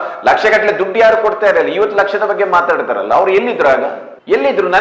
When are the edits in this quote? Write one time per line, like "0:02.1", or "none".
none